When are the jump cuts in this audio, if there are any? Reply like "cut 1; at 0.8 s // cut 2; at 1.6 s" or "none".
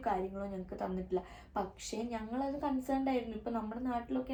none